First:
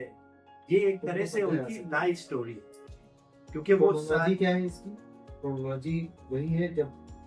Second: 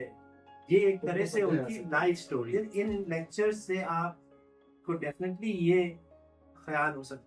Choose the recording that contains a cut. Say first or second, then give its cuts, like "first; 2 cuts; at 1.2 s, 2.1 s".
second; 1 cut; at 2.5 s